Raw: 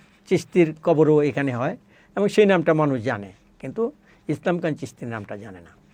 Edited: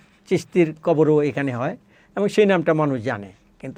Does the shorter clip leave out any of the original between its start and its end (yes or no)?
no